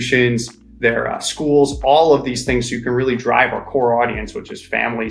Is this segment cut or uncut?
uncut